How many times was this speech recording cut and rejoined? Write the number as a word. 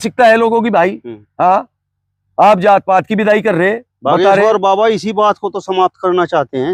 zero